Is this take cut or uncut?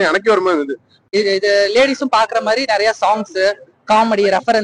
cut